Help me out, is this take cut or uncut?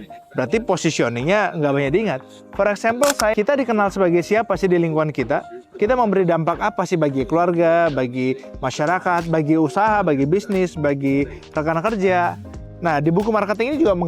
cut